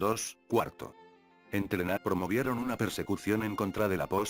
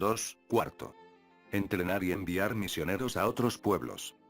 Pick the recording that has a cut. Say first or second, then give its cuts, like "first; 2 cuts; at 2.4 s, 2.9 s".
second; 1 cut; at 2.0 s